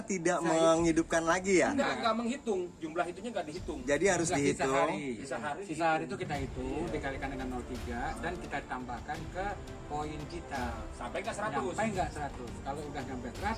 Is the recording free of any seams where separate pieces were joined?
yes; 0 cuts

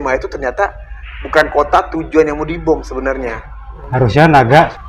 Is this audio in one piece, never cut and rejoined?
no; 1 cut; at 3.8 s

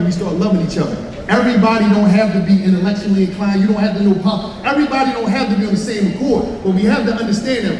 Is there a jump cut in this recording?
no; 0 cuts

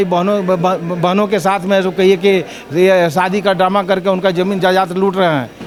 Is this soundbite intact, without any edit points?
yes; 0 cuts

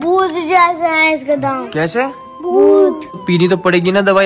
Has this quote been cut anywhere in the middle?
yes; 1 cut; at 3.2 s

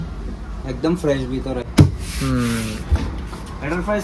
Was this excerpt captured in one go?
yes; 0 cuts

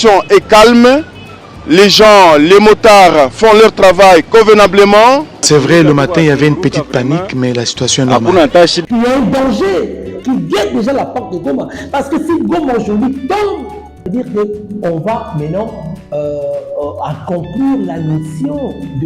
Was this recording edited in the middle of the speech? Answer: yes; 3 cuts; at 5.4 s, 8.8 s, 14.0 s

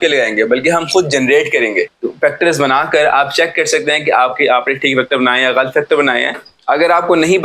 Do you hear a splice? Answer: yes; 2 cuts; at 1.9 s, 6.5 s

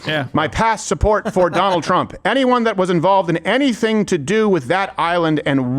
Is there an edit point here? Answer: no; 0 cuts

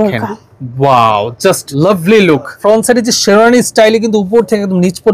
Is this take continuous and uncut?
no; 2 cuts; at 1.7 s, 2.6 s

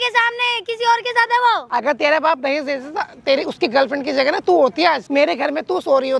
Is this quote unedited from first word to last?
no; 2 cuts; at 1.6 s, 5.0 s

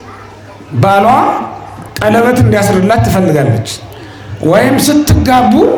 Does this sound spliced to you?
no; 0 cuts

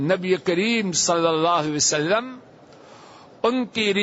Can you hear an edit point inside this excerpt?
no; 0 cuts

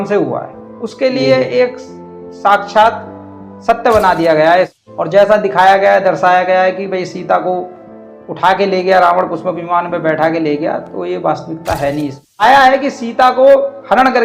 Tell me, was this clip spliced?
yes; 2 cuts; at 4.7 s, 12.4 s

